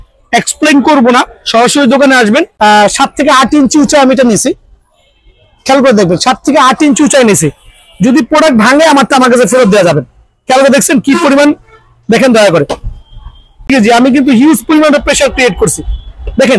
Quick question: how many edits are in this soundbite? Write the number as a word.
two